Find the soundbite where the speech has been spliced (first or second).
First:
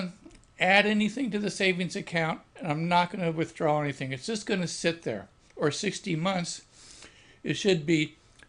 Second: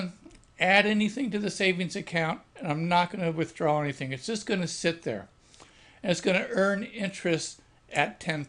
second